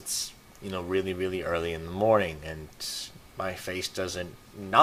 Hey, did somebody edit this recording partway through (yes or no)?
no